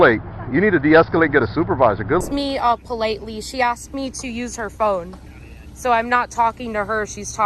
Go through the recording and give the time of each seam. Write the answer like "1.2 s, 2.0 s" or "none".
2.2 s

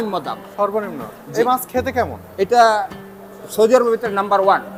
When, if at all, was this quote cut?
none

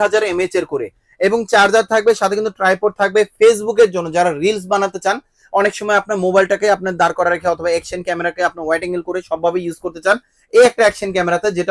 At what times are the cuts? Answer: none

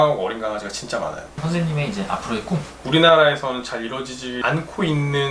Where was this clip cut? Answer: 1.4 s, 2.8 s

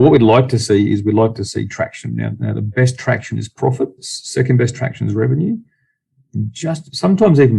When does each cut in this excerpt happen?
4.1 s

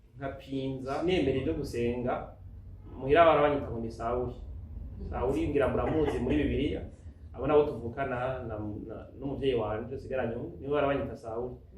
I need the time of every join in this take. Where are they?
1.0 s

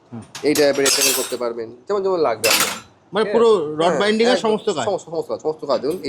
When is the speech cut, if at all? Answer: none

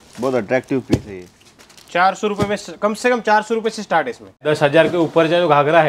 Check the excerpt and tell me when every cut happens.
4.4 s

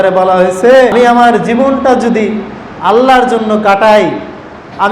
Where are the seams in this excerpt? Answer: 0.9 s

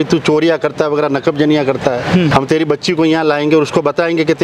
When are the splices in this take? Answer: 2.3 s

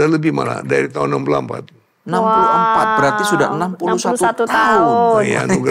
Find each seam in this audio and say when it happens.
none

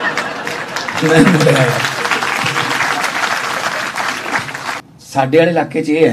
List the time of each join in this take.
4.8 s

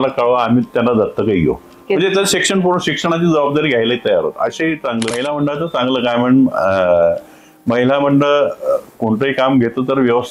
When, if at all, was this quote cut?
5.1 s

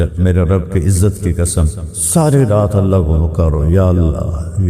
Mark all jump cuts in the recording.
none

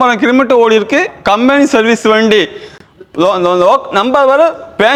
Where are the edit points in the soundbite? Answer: none

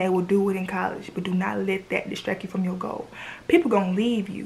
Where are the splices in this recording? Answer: none

